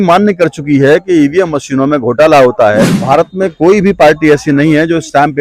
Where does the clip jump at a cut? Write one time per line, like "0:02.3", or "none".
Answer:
0:02.9

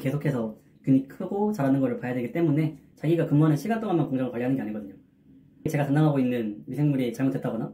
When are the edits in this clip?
0:02.9
0:05.7

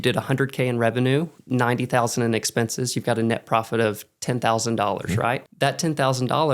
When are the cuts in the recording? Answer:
0:01.4
0:05.5

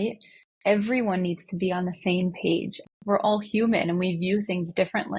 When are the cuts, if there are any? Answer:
0:02.8

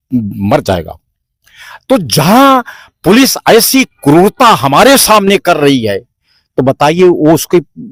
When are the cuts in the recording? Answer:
none

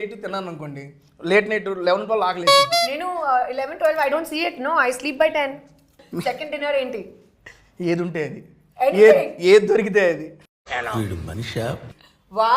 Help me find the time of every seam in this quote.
0:06.0

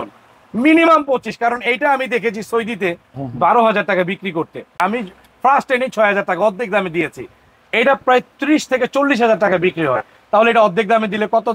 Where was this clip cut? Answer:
0:04.8

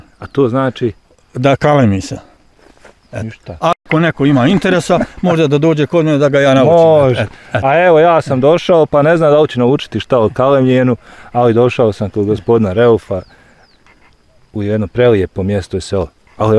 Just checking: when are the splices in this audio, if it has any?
none

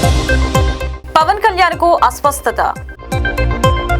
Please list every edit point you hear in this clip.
none

